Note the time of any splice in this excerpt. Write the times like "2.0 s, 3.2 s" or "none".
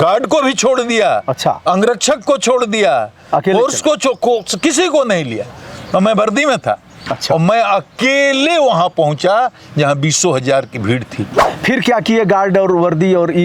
11.4 s